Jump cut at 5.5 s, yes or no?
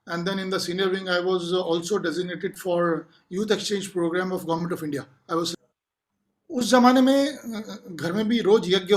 yes